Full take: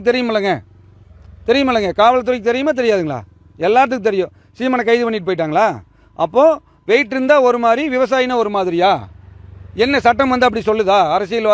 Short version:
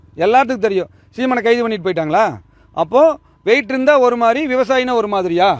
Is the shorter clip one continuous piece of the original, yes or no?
yes